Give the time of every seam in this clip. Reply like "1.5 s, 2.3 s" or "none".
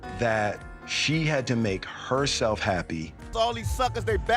3.2 s